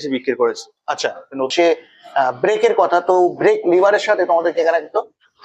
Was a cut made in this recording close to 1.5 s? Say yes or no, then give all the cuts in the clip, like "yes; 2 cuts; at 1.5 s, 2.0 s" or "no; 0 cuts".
yes; 1 cut; at 1.5 s